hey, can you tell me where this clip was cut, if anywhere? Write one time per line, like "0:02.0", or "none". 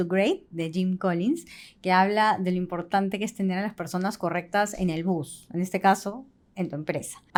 none

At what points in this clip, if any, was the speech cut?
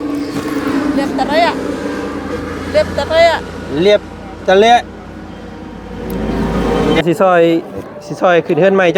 0:07.0

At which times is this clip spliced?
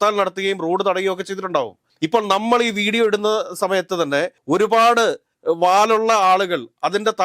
0:01.8
0:04.4
0:05.3

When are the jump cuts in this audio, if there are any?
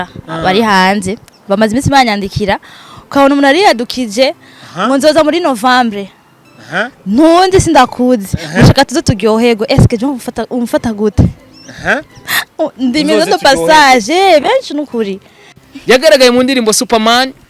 0:15.5

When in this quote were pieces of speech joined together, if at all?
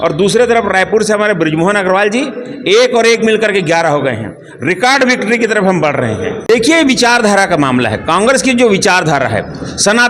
0:06.4

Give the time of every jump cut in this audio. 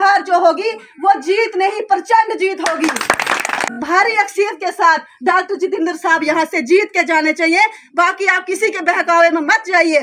0:03.8

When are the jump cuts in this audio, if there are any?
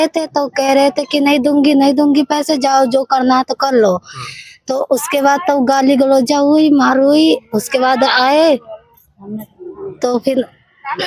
none

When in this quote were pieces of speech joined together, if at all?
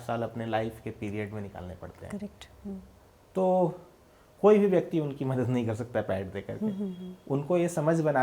none

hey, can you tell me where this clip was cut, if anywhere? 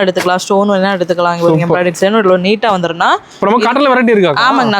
0:03.3

